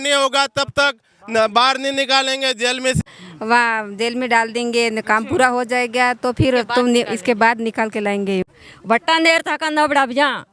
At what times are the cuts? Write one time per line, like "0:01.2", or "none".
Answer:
0:03.0
0:08.5